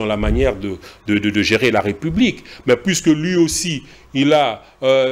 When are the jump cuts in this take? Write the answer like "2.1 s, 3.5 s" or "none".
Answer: none